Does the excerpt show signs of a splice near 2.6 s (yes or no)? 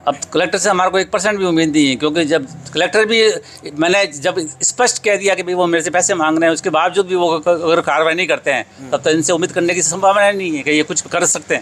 no